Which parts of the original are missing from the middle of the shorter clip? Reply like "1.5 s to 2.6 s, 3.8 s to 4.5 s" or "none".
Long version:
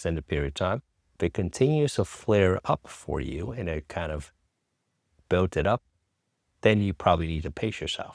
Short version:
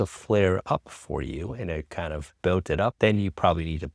4.3 s to 5.2 s, 5.8 s to 6.6 s